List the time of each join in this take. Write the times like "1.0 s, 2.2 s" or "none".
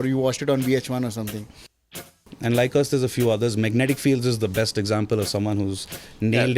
2.2 s